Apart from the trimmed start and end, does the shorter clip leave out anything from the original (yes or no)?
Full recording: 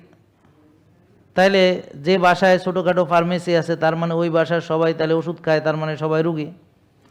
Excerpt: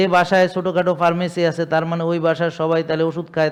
no